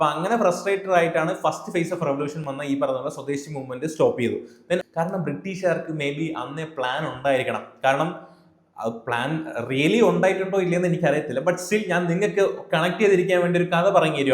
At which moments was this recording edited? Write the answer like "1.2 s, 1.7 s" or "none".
4.8 s